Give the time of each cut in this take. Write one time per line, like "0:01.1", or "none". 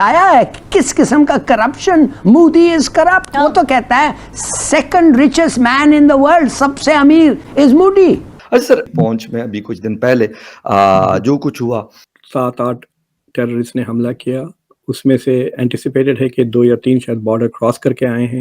0:07.5
0:08.3
0:12.0
0:14.8